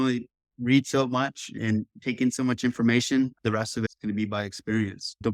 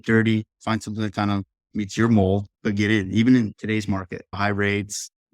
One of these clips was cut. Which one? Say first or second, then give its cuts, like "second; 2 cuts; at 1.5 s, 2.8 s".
second; 2 cuts; at 2.5 s, 3.5 s